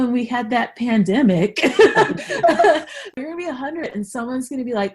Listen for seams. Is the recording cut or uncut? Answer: cut